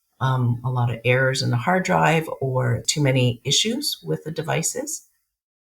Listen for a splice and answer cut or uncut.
cut